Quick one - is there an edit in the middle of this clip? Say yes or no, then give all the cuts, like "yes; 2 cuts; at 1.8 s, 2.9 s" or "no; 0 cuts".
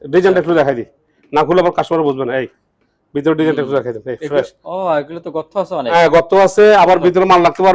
no; 0 cuts